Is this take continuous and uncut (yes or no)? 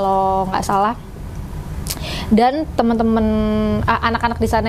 yes